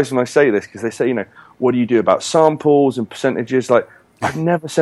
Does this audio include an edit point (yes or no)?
no